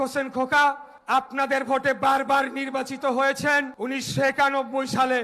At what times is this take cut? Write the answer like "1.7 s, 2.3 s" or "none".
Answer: 0.9 s, 3.7 s